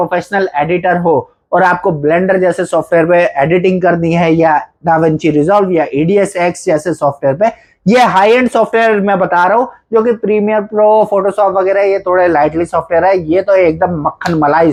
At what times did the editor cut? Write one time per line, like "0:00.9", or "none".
none